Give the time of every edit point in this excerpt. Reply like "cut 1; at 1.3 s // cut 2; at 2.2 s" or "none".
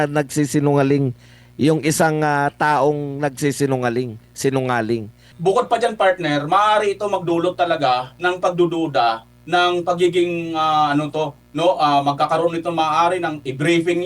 cut 1; at 5.3 s